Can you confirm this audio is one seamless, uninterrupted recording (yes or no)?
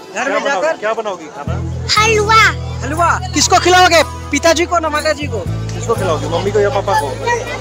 yes